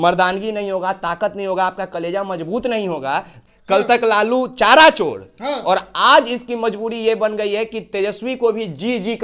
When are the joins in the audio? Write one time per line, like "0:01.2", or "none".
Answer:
0:03.4